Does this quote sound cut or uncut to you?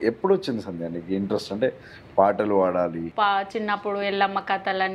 cut